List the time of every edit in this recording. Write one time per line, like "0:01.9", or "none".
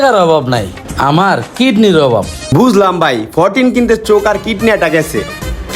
0:02.4